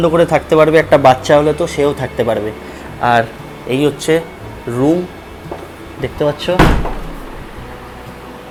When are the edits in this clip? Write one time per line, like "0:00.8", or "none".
none